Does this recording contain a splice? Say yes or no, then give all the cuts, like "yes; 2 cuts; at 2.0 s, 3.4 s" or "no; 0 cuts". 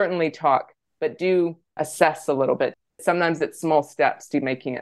yes; 2 cuts; at 1.7 s, 2.9 s